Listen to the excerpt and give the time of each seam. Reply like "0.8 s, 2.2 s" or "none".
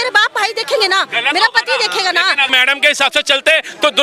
2.5 s